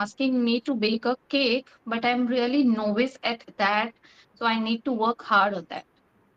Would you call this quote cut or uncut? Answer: uncut